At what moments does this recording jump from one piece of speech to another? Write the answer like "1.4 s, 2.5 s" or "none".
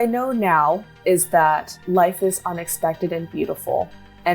0.9 s, 1.7 s